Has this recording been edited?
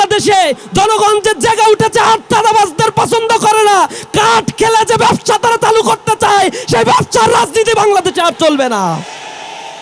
no; 0 cuts

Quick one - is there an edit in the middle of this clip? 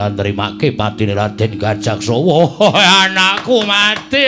no; 0 cuts

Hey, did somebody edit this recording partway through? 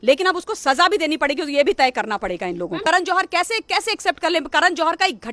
yes; 1 cut; at 2.8 s

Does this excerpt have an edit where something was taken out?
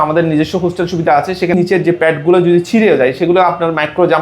yes; 1 cut; at 1.5 s

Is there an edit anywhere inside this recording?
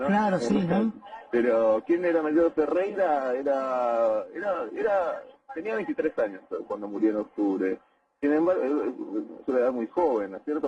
yes; 1 cut; at 2.9 s

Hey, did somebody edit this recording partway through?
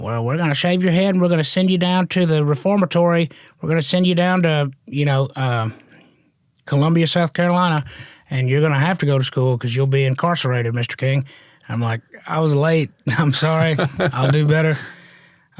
no; 0 cuts

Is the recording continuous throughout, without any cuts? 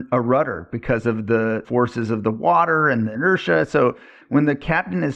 no; 2 cuts; at 1.6 s, 3.1 s

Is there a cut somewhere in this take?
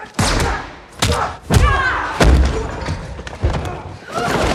no; 0 cuts

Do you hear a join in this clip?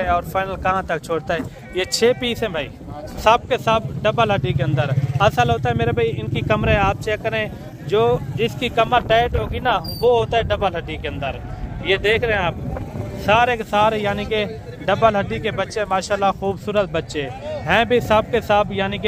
yes; 1 cut; at 3.0 s

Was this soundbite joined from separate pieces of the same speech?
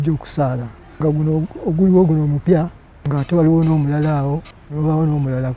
yes; 3 cuts; at 1.0 s, 2.5 s, 4.6 s

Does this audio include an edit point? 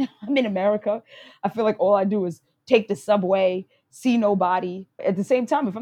yes; 1 cut; at 4.9 s

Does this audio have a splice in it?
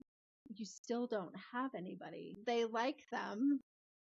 yes; 1 cut; at 2.3 s

